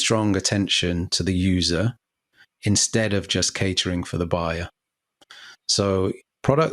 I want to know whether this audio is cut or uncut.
uncut